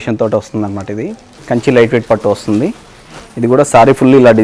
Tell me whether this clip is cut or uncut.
cut